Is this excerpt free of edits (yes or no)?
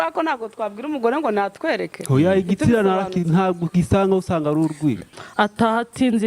no